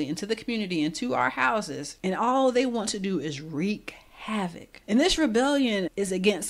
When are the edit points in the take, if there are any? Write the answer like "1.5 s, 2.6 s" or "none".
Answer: 1.8 s, 4.7 s